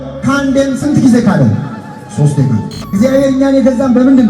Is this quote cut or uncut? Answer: cut